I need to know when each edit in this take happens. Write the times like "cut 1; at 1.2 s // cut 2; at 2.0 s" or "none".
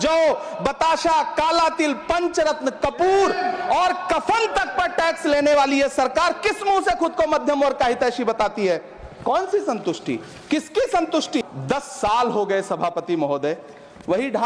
cut 1; at 11.4 s